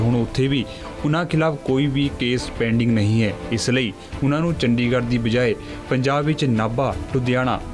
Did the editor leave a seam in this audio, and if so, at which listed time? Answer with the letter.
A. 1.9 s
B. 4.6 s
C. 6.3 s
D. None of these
A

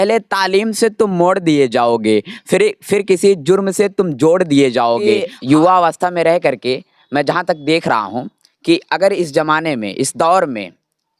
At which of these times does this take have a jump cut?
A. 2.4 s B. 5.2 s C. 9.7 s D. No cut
B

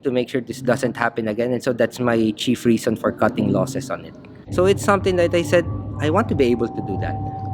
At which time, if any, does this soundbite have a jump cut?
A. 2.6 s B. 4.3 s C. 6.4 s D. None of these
B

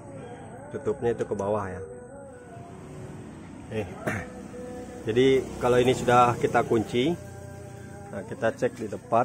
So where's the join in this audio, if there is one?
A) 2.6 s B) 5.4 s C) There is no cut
A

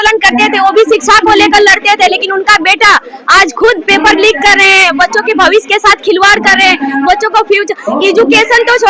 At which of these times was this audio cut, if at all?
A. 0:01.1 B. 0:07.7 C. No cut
C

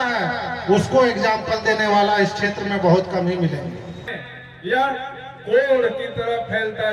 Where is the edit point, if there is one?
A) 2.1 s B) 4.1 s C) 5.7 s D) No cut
B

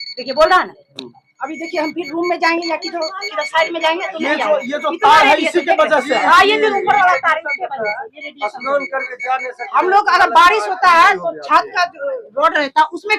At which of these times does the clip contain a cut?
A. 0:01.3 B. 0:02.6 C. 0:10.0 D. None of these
D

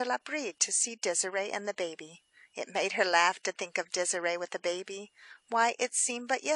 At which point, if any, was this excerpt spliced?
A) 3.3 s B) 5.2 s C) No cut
A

